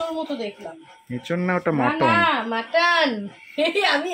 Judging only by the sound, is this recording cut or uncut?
uncut